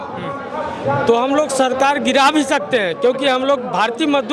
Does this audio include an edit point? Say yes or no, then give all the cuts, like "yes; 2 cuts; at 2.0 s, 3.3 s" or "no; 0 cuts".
no; 0 cuts